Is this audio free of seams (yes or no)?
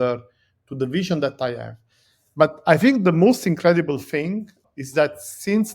no